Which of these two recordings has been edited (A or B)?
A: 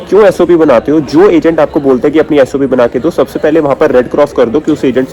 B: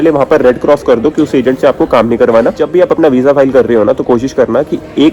B